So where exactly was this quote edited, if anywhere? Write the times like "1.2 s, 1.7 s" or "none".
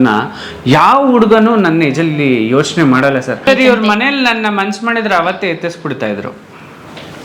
3.4 s